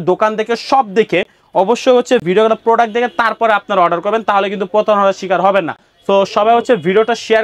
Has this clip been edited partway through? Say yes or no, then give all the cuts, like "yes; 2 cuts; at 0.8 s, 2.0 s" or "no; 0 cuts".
no; 0 cuts